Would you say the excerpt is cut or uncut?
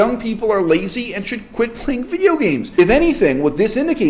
cut